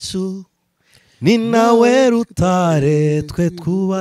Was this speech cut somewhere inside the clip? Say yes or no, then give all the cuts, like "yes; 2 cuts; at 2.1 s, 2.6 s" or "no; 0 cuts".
no; 0 cuts